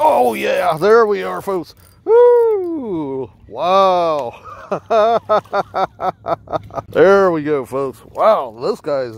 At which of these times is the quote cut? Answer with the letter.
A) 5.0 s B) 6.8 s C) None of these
B